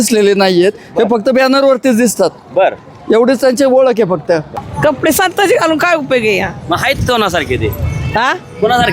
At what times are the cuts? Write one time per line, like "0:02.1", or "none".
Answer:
0:04.5